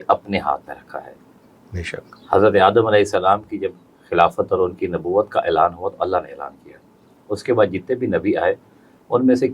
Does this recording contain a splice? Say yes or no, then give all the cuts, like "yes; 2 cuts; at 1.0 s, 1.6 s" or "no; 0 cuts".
no; 0 cuts